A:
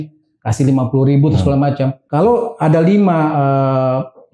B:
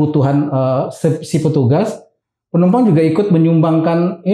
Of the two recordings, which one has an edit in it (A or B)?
A